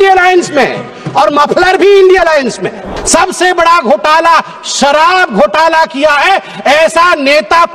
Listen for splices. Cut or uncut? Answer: cut